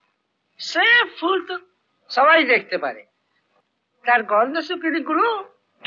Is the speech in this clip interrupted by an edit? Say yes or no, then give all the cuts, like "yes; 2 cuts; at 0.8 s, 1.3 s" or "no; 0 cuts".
no; 0 cuts